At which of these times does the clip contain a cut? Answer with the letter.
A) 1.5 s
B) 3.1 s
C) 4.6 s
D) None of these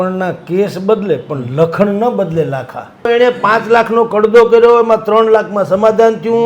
B